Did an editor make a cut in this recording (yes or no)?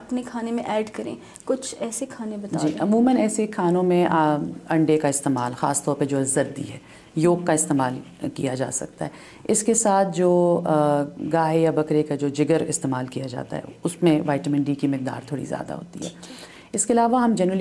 no